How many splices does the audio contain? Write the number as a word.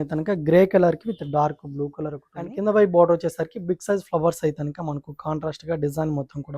one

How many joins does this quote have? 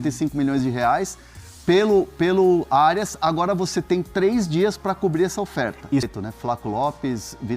one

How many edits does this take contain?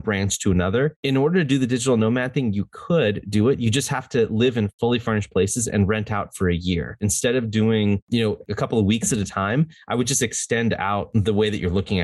five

